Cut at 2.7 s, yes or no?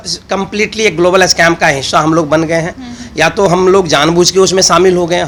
no